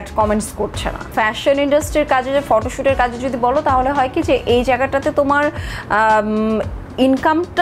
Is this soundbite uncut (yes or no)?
no